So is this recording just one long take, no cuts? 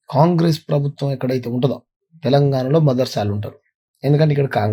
yes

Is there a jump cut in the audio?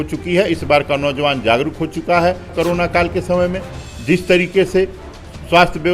yes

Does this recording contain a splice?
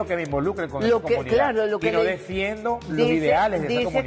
no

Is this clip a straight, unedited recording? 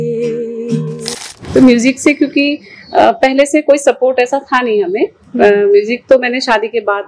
no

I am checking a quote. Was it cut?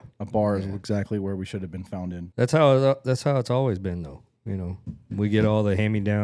yes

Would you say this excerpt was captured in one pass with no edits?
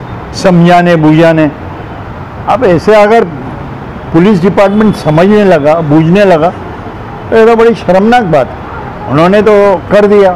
yes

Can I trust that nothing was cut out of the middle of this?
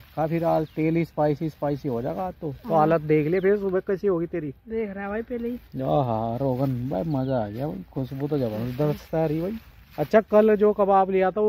yes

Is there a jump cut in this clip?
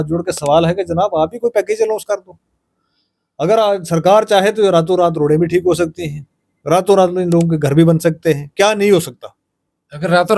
no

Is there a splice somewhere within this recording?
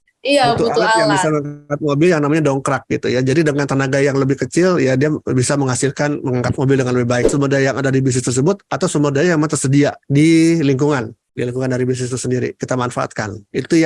yes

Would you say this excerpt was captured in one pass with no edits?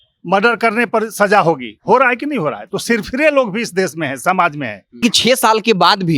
no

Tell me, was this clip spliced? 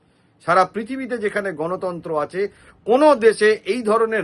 no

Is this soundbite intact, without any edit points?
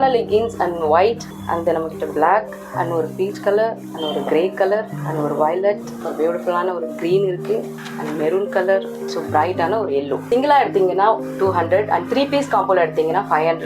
no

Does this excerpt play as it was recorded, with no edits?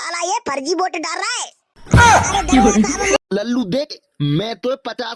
no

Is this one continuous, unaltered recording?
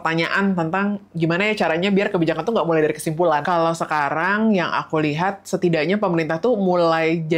no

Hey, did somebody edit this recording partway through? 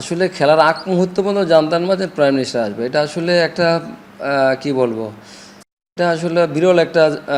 no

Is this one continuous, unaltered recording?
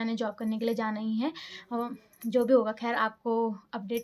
yes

